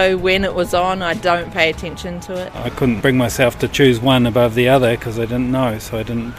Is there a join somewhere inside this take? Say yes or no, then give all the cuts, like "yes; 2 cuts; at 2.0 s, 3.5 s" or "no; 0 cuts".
yes; 1 cut; at 2.7 s